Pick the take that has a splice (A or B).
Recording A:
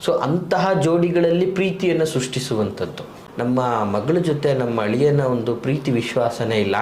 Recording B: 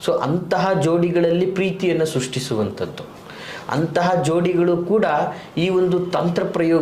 A